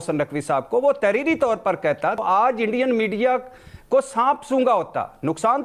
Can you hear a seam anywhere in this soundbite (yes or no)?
no